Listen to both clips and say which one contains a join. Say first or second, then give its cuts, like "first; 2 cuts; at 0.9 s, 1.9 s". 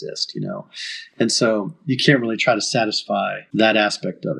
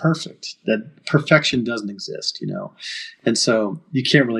first; 1 cut; at 3.4 s